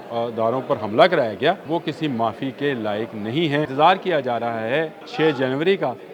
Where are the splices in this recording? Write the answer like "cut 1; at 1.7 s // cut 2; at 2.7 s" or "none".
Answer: cut 1; at 1.6 s // cut 2; at 3.7 s // cut 3; at 5.0 s